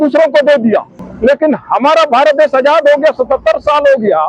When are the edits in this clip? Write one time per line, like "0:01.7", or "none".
0:01.0